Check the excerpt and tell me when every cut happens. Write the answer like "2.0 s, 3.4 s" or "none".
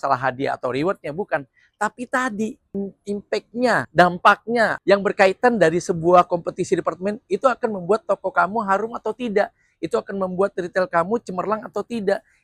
3.9 s, 4.8 s